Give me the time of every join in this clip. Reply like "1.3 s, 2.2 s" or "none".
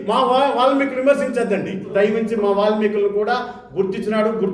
1.9 s